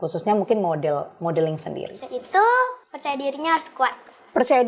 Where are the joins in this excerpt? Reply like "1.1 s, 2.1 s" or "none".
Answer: 1.9 s, 2.9 s